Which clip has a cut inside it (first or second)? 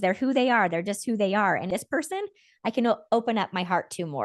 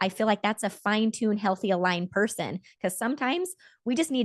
first